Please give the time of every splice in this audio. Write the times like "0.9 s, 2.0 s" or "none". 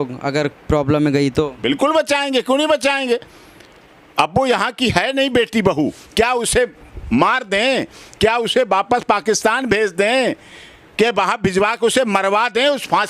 none